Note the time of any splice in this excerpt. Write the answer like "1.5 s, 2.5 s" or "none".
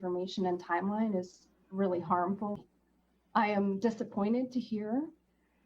2.6 s